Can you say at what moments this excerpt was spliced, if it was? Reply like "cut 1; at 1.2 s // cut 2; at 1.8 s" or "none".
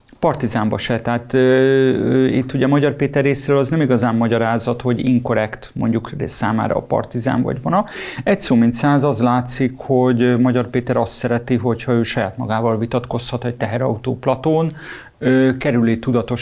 none